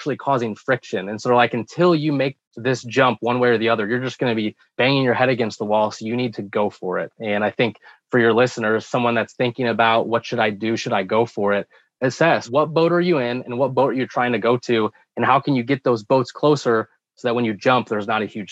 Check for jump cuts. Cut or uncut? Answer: cut